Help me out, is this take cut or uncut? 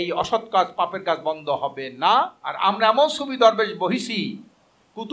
cut